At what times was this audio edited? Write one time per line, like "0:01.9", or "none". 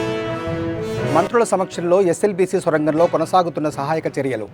0:01.0